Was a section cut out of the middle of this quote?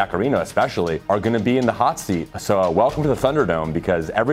yes; 2 cuts; at 1.0 s, 2.3 s

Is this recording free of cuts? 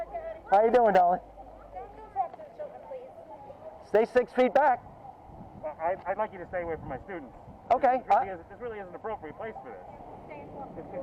no; 2 cuts; at 3.7 s, 10.1 s

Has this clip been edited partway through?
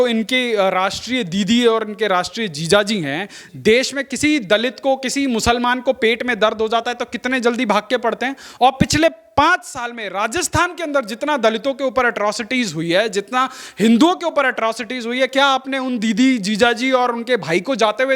no; 0 cuts

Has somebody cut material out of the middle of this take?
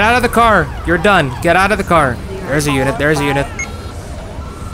yes; 1 cut; at 2.3 s

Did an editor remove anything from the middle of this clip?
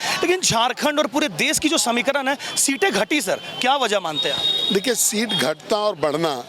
no; 0 cuts

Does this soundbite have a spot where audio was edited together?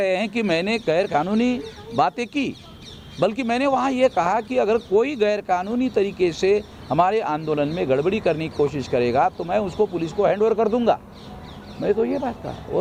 no; 0 cuts

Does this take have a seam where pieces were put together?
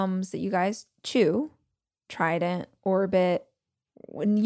no; 0 cuts

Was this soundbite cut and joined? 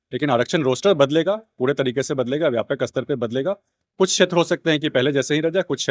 no; 0 cuts

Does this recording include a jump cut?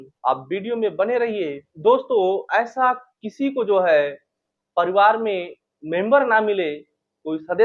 no; 0 cuts

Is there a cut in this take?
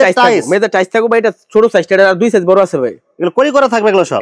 no; 0 cuts

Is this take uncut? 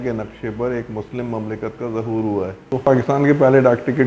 no; 1 cut; at 2.8 s

